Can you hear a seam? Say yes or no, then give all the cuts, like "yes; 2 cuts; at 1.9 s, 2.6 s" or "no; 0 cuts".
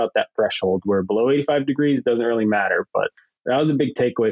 yes; 1 cut; at 3.1 s